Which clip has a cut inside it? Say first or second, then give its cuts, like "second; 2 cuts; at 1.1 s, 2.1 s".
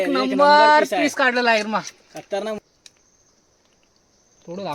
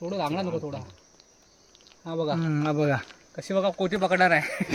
first; 1 cut; at 2.6 s